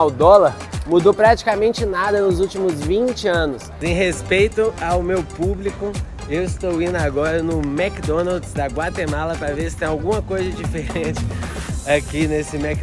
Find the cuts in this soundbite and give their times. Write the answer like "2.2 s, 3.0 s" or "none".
3.7 s